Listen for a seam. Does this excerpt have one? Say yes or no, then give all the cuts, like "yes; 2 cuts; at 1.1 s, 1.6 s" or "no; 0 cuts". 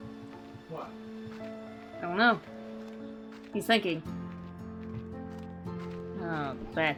no; 0 cuts